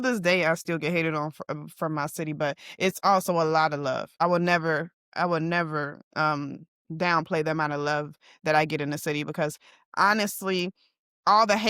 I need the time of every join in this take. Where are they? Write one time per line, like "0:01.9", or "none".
0:04.2